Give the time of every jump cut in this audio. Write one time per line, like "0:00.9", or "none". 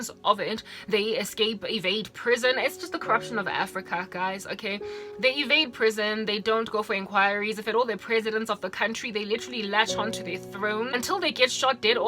0:10.9